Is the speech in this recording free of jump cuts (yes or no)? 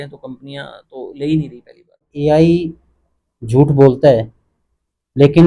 no